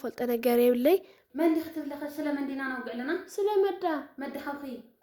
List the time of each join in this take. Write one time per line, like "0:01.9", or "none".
0:01.2